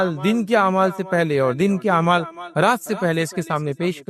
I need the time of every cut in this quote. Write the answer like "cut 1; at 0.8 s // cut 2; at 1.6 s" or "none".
none